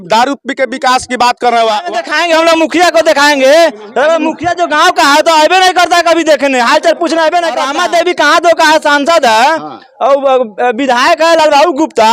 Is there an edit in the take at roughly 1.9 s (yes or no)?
yes